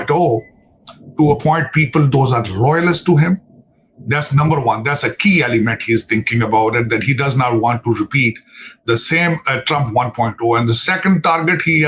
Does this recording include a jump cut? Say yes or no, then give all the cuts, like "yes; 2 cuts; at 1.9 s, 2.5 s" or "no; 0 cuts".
no; 0 cuts